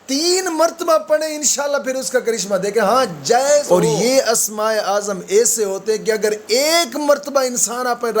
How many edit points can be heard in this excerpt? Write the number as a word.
one